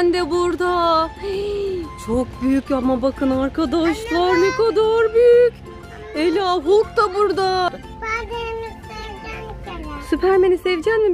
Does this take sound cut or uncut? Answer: cut